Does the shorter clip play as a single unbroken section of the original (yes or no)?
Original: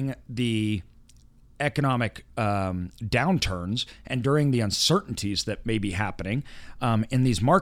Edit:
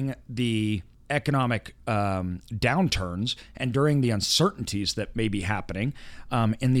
no